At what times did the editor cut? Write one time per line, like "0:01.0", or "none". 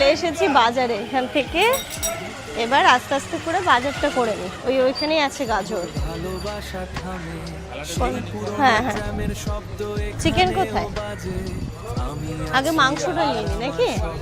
none